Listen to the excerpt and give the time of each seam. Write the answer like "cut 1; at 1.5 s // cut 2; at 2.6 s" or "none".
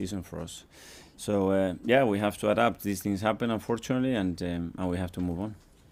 none